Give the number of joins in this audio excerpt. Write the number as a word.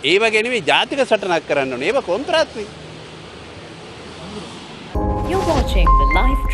one